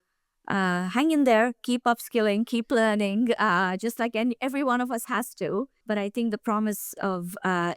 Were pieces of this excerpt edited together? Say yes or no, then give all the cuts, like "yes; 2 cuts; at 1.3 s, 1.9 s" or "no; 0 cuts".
yes; 1 cut; at 5.8 s